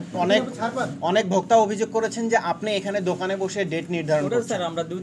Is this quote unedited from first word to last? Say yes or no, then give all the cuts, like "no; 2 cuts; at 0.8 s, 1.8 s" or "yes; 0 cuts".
yes; 0 cuts